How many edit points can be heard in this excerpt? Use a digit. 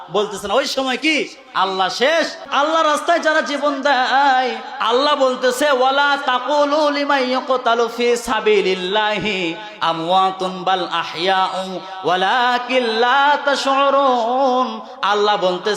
1